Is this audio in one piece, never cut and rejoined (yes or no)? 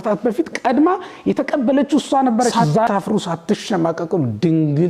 no